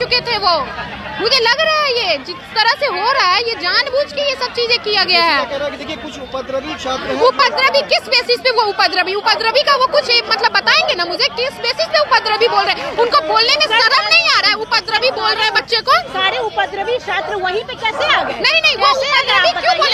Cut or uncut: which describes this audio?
uncut